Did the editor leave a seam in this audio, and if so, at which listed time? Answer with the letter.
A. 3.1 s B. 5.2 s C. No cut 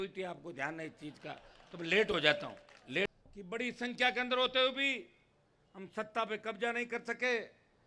A